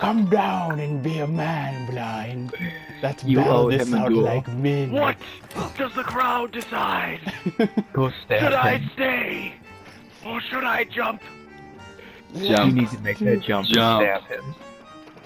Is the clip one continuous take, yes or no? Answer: yes